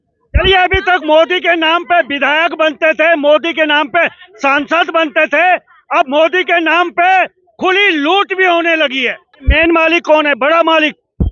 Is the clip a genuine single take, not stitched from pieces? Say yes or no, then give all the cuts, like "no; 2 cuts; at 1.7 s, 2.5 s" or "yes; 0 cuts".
no; 1 cut; at 9.4 s